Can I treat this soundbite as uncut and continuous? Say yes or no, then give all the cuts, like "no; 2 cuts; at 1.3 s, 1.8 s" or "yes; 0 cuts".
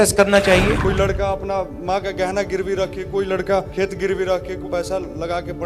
no; 3 cuts; at 0.8 s, 3.7 s, 4.7 s